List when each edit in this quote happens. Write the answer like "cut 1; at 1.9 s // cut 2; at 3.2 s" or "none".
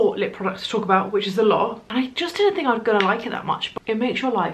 cut 1; at 1.8 s // cut 2; at 3.6 s